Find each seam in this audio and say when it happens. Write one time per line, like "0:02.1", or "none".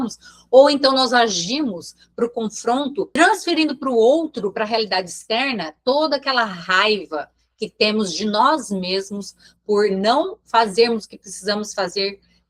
none